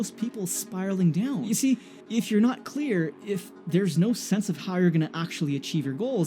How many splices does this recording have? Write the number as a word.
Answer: one